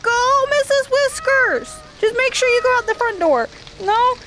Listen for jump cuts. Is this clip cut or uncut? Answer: uncut